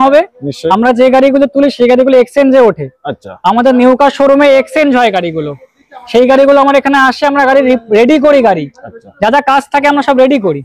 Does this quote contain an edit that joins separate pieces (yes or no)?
no